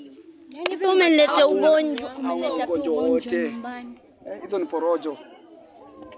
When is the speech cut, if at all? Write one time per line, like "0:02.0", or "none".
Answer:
none